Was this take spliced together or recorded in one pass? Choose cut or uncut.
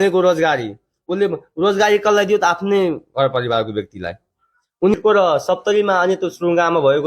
cut